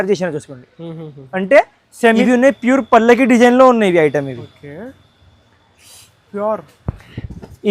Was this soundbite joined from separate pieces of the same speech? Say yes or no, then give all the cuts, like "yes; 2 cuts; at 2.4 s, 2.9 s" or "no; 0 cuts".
yes; 1 cut; at 2.2 s